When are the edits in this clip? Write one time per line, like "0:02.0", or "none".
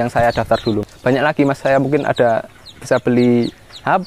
0:00.9